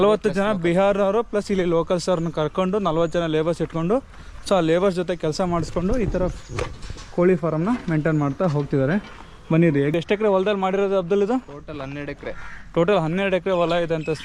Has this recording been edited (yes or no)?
yes